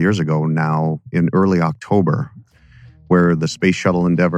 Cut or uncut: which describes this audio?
cut